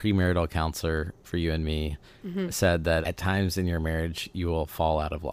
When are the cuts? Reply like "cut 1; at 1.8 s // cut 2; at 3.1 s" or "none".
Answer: none